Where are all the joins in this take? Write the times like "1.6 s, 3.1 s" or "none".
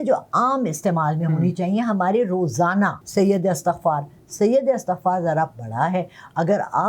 3.0 s